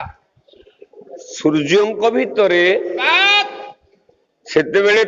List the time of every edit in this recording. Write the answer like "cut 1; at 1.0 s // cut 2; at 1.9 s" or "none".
cut 1; at 2.3 s